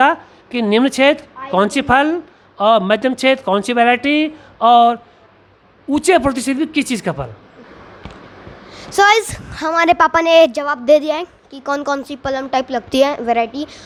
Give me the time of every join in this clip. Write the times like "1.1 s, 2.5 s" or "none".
none